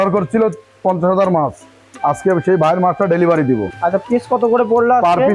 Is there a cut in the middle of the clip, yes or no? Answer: yes